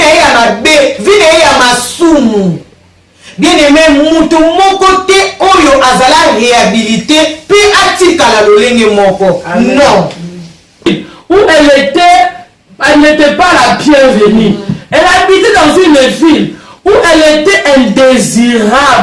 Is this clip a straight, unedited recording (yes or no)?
no